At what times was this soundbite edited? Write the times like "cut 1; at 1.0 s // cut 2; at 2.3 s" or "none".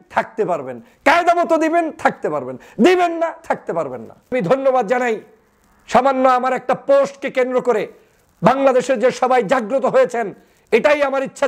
cut 1; at 4.3 s